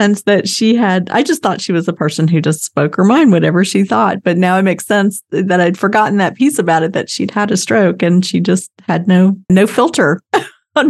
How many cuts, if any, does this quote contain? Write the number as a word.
one